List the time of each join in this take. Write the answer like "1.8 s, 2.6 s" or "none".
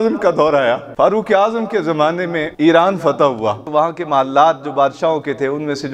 0.9 s, 2.5 s, 3.7 s